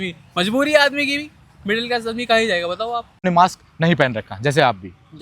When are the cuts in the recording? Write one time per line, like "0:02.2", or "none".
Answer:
0:03.2